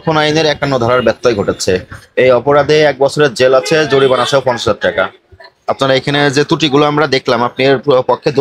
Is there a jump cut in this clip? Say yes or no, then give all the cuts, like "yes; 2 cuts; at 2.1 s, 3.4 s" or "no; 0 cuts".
no; 0 cuts